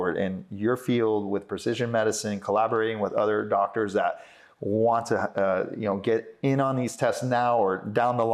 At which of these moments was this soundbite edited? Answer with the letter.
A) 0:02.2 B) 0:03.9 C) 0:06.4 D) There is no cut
D